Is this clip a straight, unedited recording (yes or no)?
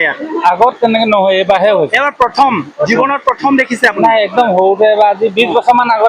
yes